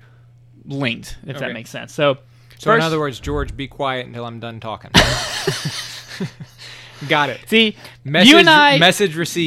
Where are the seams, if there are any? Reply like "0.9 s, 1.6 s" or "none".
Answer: none